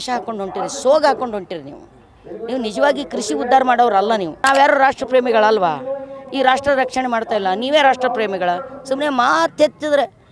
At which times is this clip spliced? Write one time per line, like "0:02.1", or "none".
0:04.3